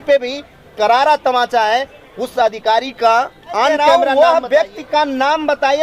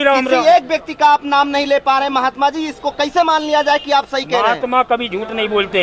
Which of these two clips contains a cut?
first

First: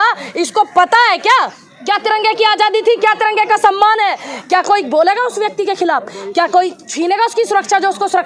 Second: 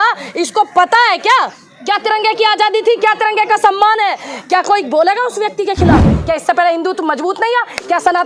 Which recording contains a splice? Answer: second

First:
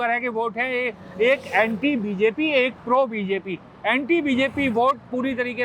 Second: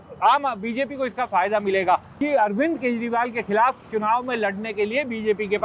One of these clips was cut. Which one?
second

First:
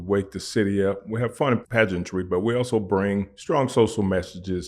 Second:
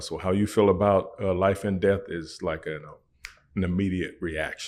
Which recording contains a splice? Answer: first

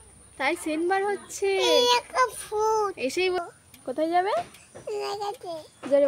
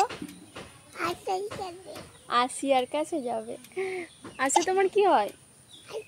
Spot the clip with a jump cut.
first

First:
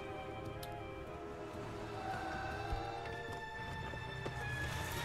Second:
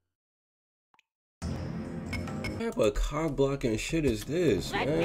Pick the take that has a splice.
second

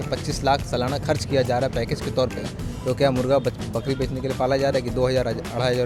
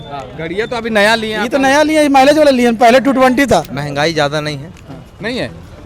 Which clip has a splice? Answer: second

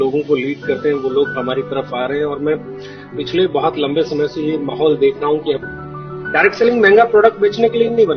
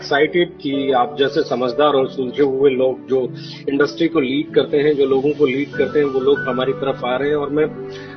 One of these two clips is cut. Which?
first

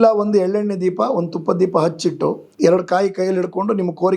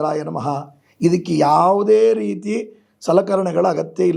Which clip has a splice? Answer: first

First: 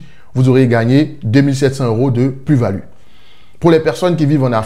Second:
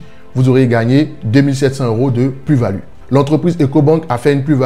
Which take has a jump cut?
second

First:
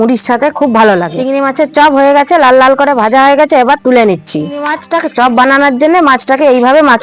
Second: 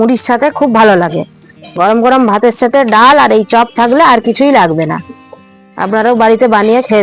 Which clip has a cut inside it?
first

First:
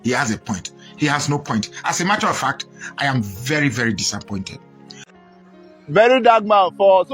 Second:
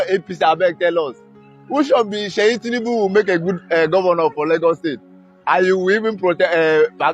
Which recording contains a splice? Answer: first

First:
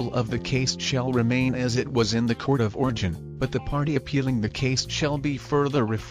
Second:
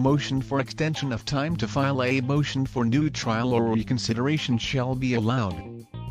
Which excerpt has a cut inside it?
first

